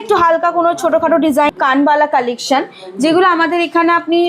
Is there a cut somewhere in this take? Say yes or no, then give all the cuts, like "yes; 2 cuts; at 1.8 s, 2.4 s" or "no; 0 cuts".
yes; 1 cut; at 1.5 s